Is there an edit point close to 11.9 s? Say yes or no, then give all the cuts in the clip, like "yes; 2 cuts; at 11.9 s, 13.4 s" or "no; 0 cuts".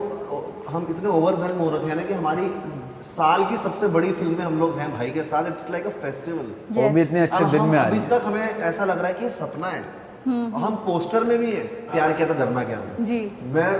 yes; 1 cut; at 11.9 s